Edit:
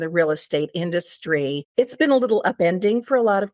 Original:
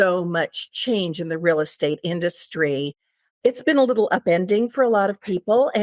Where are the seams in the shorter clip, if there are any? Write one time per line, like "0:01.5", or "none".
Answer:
0:01.6